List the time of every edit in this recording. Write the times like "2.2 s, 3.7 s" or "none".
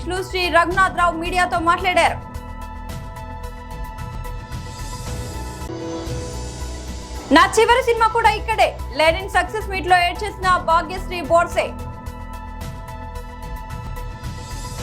13.9 s